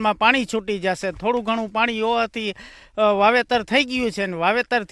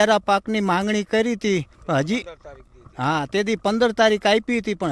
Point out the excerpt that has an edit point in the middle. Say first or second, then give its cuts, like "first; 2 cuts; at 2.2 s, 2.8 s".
first; 1 cut; at 3.5 s